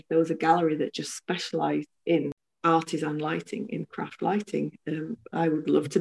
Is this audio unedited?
no; 1 cut; at 2.4 s

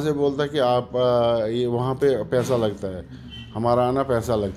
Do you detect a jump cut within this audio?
no; 0 cuts

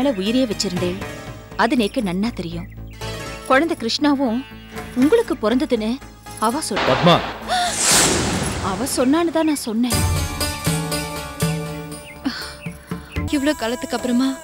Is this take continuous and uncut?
no; 1 cut; at 13.3 s

